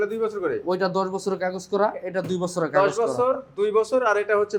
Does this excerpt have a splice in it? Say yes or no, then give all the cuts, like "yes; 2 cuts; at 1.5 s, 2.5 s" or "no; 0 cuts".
no; 0 cuts